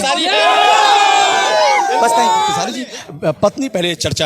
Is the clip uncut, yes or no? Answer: no